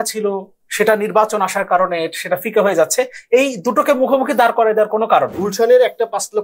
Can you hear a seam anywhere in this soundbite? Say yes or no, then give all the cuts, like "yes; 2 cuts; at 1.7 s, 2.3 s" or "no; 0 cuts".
yes; 1 cut; at 5.4 s